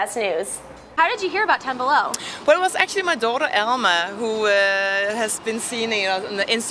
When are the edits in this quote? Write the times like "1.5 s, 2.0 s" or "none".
1.0 s